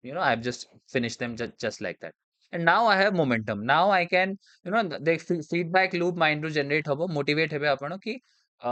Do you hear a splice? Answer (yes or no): no